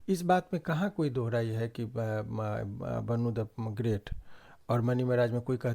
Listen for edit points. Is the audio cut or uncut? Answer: uncut